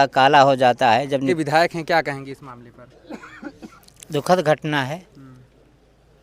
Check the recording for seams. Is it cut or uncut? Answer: cut